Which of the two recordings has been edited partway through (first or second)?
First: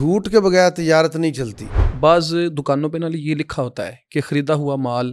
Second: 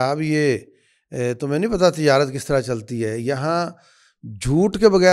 first